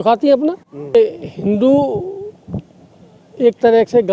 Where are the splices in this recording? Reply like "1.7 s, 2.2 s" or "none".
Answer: 0.9 s